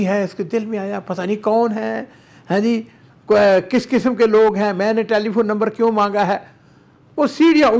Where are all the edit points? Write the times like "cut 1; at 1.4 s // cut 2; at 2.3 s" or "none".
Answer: none